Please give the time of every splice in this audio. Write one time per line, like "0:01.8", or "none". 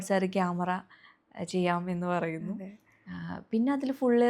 none